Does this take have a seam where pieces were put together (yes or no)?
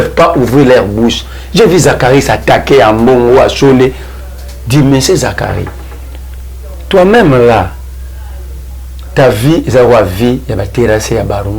no